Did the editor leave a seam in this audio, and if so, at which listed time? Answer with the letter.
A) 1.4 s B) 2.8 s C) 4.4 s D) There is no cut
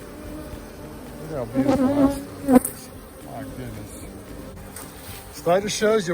C